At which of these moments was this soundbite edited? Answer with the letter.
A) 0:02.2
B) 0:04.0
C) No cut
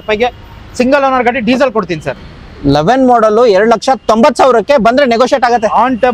C